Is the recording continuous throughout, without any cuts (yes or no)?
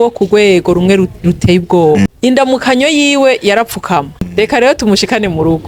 no